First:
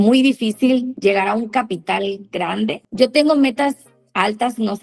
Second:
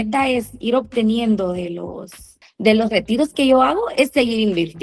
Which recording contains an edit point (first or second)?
first